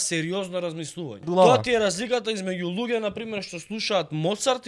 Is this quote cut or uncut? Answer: cut